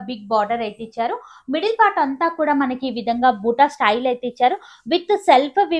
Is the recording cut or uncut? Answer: uncut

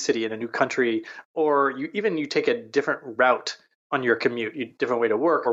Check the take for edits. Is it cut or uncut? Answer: uncut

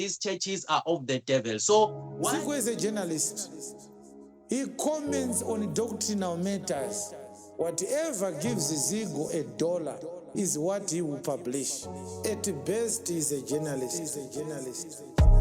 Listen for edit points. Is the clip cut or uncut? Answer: cut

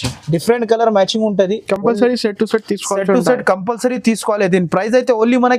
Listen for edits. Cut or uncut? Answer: uncut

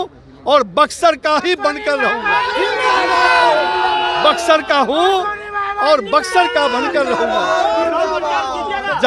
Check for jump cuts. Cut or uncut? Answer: uncut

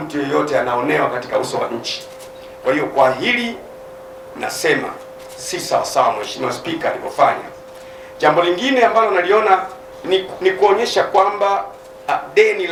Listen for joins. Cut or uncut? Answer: uncut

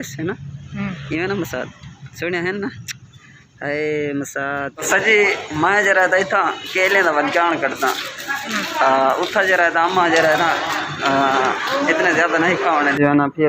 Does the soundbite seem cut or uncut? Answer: cut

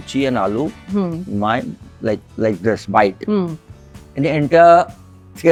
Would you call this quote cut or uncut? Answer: uncut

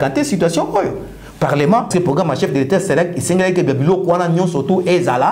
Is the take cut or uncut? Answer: cut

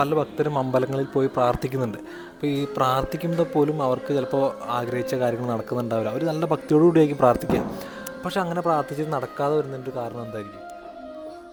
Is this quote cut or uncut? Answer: uncut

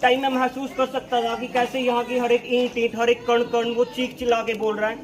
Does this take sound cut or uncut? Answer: uncut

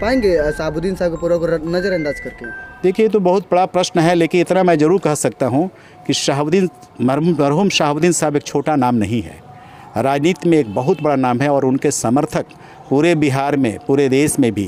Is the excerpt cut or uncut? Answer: uncut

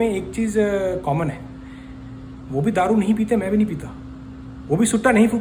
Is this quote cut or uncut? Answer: uncut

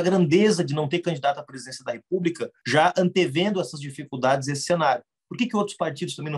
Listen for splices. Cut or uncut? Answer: cut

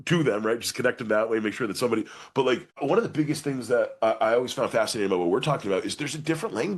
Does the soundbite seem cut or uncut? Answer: uncut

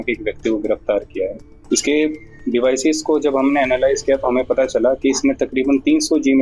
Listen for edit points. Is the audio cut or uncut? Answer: cut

